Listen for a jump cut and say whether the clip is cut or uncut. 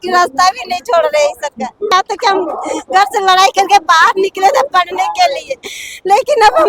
cut